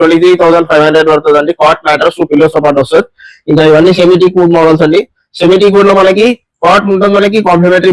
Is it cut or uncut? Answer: uncut